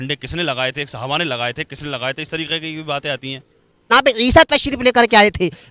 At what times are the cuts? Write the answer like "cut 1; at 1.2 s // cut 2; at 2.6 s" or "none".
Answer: cut 1; at 3.9 s